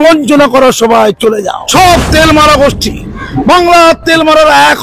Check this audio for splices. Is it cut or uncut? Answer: cut